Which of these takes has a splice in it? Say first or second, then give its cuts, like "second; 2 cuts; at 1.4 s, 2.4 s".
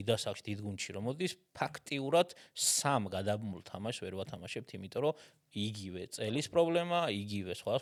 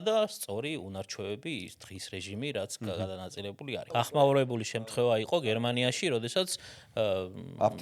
second; 1 cut; at 4.0 s